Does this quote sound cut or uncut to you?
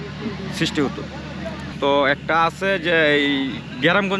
cut